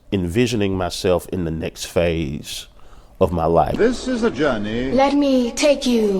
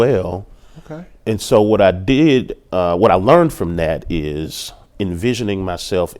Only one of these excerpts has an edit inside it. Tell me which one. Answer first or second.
first